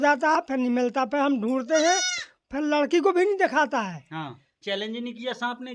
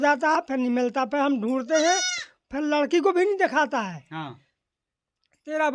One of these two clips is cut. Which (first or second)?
first